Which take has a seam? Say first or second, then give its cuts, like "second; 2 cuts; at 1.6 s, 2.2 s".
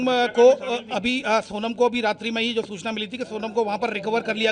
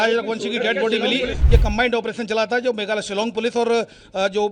second; 1 cut; at 1.4 s